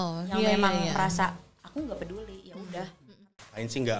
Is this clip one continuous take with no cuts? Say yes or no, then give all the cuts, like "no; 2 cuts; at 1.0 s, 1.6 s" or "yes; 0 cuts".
no; 1 cut; at 3.0 s